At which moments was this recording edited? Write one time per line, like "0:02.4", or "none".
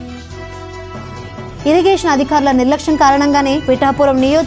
0:01.0